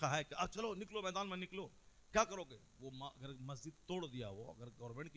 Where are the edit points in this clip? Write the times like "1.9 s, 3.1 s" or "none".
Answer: none